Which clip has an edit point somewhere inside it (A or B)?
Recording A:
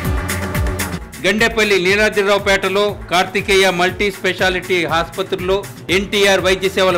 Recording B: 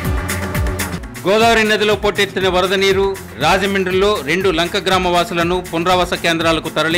B